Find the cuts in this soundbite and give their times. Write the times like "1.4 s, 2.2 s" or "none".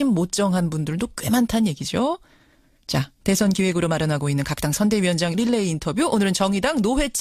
5.5 s